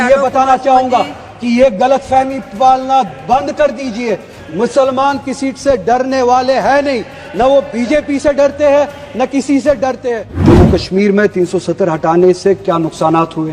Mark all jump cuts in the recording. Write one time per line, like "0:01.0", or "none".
0:10.4

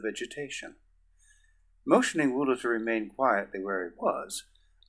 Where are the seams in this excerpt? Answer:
0:03.5

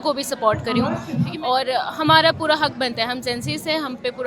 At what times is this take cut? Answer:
0:01.3

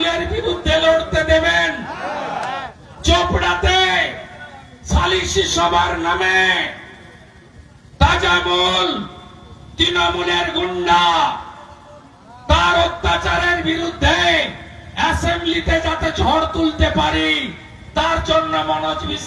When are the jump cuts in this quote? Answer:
none

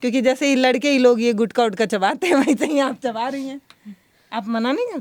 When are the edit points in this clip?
none

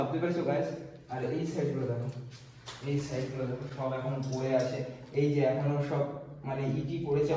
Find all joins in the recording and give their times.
none

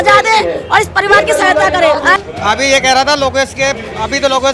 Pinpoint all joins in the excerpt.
0:02.2

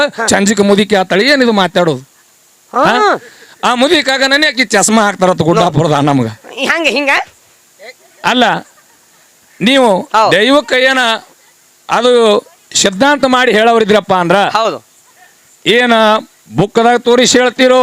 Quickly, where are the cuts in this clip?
none

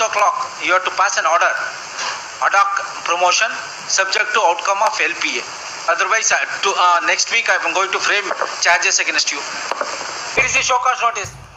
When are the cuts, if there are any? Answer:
0:10.5

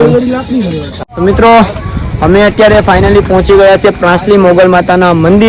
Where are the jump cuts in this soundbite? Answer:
0:01.0

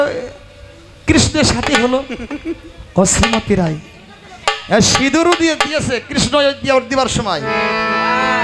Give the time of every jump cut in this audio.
none

